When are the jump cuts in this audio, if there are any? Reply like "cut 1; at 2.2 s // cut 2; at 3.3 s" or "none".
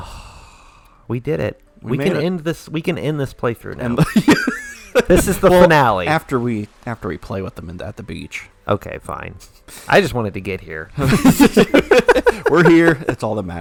none